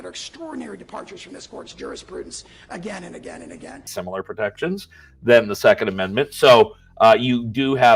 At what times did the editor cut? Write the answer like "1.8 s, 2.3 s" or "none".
none